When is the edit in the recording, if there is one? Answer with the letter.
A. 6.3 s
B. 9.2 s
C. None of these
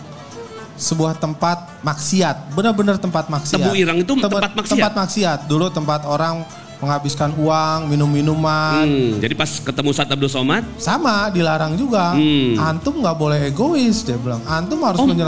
B